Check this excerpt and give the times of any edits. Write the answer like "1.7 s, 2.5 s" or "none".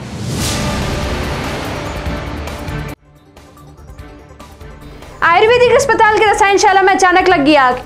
3.9 s, 4.8 s